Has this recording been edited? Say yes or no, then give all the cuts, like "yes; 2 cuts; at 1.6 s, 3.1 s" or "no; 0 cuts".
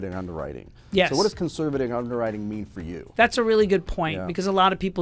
no; 0 cuts